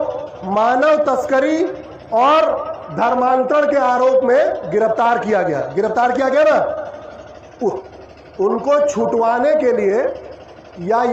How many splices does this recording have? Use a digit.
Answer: 1